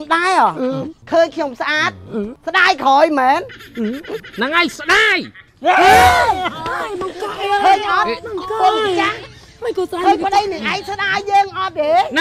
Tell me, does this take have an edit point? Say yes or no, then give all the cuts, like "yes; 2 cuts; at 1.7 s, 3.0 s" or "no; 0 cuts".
yes; 2 cuts; at 1.0 s, 2.4 s